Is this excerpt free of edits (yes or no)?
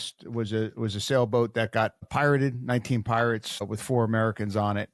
no